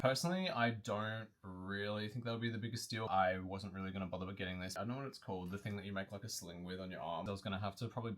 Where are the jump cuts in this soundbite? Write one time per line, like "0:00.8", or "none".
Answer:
0:03.1
0:04.8
0:07.2